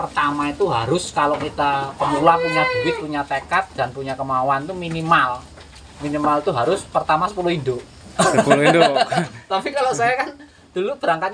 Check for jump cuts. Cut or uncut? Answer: uncut